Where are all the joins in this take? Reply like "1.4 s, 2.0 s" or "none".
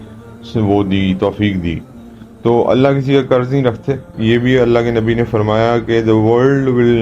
4.1 s